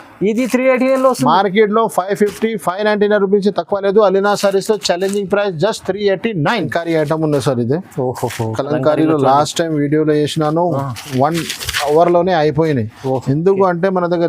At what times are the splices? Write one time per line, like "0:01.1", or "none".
0:06.7